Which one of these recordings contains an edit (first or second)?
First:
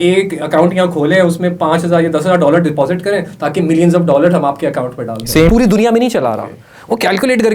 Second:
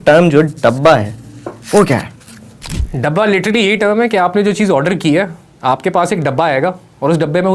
first